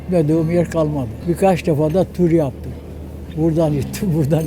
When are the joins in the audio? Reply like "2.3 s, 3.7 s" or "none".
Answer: 1.1 s